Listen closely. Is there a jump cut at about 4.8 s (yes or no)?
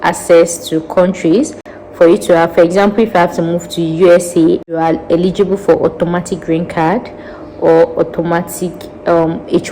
yes